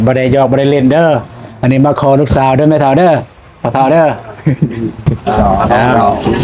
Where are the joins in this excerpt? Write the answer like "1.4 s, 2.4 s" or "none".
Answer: none